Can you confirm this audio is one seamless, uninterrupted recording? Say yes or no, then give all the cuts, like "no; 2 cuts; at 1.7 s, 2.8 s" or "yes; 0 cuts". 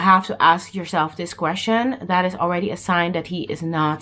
yes; 0 cuts